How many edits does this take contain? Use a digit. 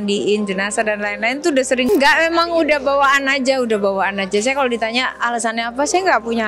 1